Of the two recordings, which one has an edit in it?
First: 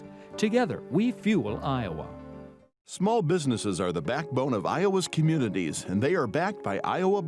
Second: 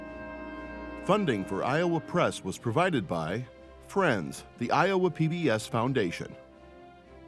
second; 1 cut; at 1.1 s

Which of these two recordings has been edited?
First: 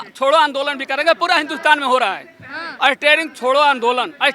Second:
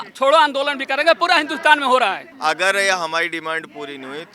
second; 1 cut; at 2.3 s

